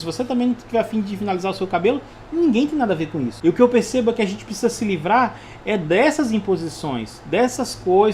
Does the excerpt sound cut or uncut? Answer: cut